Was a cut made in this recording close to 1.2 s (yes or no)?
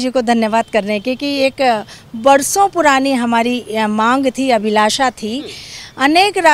no